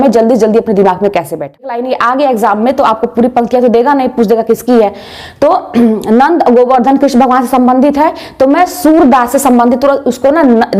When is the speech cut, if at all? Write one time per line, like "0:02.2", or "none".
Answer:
0:01.8